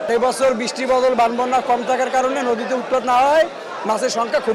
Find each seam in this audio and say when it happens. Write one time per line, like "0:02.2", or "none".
none